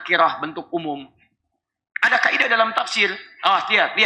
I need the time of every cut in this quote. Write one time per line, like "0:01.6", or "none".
none